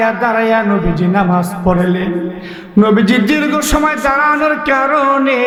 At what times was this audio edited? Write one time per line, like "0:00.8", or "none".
none